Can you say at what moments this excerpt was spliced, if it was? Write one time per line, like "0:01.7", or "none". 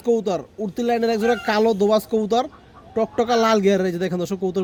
none